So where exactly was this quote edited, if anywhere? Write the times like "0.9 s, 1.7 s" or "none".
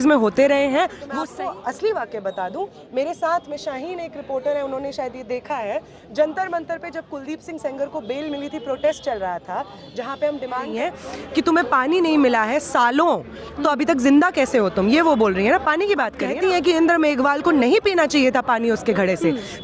1.0 s, 11.0 s, 16.2 s